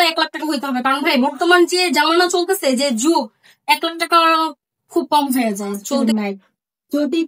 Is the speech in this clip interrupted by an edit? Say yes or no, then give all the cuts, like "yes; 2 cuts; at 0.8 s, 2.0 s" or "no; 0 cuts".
yes; 1 cut; at 5.8 s